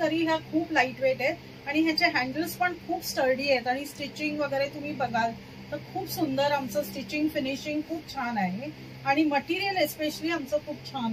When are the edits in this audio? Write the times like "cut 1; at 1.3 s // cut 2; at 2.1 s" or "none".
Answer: none